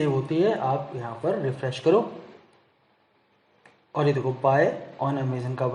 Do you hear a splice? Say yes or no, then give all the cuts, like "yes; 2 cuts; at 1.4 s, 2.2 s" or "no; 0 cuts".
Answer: no; 0 cuts